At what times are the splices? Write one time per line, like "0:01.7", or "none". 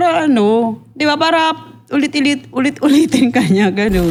none

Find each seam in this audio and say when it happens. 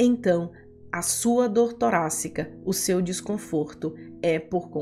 none

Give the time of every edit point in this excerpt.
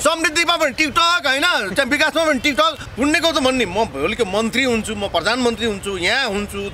0:02.8

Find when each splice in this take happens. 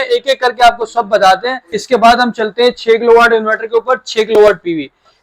0:01.7

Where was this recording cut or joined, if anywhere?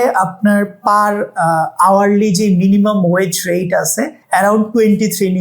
0:04.2

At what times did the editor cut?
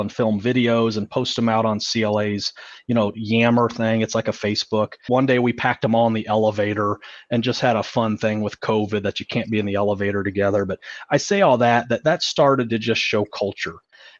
0:05.0

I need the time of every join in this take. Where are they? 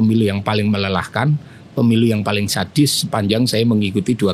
none

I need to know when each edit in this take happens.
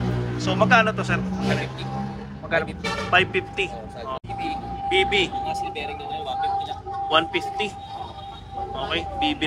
0:04.2

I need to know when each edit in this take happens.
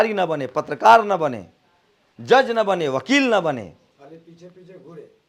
none

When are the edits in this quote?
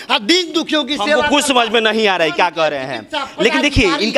none

